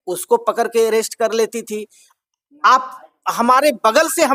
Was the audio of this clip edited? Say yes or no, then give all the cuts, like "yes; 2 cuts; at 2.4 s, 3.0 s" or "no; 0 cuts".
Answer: no; 0 cuts